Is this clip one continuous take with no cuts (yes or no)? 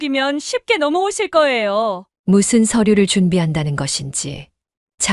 no